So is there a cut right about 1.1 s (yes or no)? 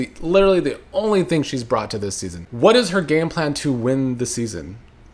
no